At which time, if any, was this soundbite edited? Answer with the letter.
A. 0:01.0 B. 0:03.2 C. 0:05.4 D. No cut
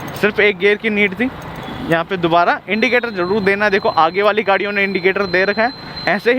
D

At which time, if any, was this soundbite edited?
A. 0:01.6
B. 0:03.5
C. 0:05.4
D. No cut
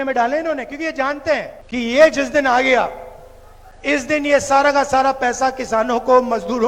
A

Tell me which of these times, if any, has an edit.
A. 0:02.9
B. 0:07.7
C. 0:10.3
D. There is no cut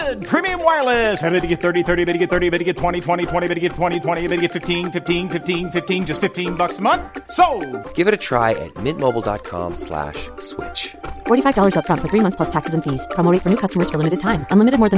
D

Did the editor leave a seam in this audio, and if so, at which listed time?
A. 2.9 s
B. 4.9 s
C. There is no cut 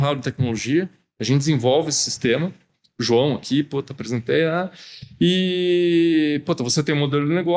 C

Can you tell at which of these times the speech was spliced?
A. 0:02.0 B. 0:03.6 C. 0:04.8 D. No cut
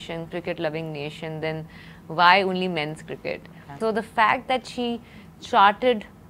D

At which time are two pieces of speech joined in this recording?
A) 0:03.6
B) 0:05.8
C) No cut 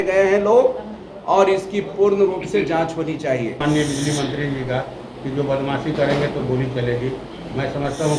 A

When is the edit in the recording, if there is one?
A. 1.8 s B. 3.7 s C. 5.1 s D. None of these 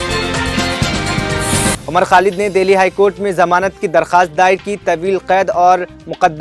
A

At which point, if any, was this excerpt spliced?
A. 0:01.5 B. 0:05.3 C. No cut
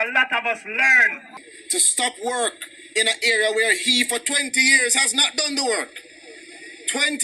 A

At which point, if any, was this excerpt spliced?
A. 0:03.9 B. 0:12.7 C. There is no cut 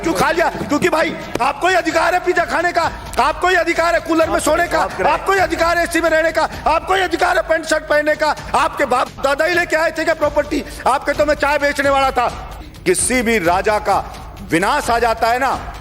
B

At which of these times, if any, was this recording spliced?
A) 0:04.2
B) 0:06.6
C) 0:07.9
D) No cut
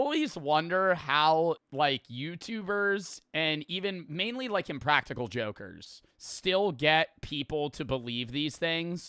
B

